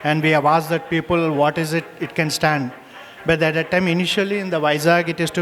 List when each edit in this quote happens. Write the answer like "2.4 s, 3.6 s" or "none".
none